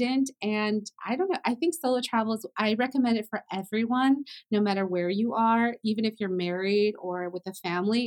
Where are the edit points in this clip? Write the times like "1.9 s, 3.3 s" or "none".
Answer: none